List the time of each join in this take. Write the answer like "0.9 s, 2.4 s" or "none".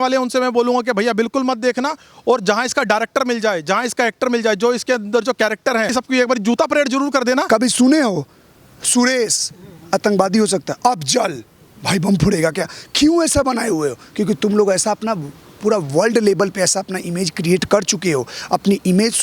5.9 s, 7.5 s

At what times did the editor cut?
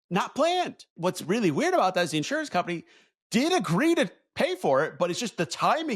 0.9 s

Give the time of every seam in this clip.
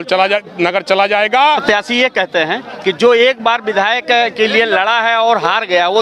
1.6 s

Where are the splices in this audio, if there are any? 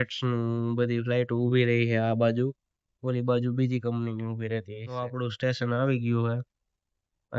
4.8 s

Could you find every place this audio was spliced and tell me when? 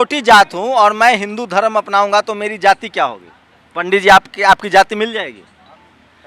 none

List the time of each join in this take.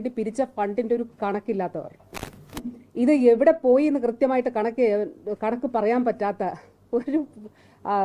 none

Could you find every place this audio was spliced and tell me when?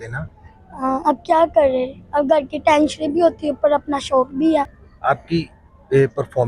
4.8 s

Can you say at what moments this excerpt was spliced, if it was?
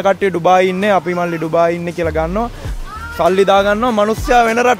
none

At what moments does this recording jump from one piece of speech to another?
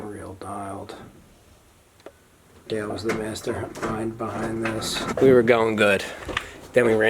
5.0 s

